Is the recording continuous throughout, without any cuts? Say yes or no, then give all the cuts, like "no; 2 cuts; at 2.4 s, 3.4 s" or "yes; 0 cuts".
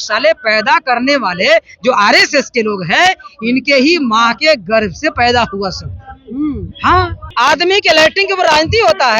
no; 1 cut; at 7.2 s